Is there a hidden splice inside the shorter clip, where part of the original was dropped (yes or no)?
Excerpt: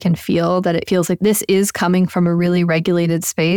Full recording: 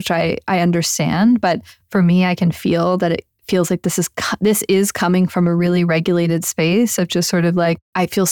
yes